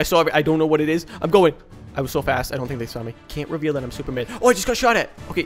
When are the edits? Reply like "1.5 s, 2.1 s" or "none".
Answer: 1.7 s, 3.2 s